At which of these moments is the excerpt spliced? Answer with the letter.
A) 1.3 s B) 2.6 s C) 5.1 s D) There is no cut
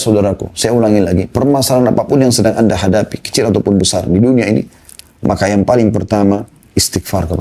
D